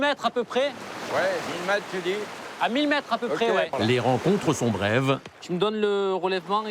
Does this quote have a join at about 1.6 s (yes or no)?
no